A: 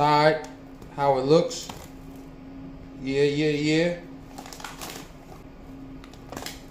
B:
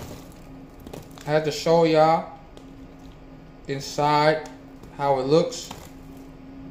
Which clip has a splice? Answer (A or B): A